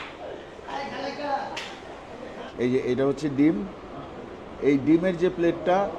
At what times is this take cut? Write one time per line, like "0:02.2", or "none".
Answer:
0:02.4